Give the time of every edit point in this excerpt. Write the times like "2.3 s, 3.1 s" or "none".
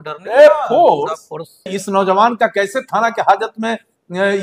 1.8 s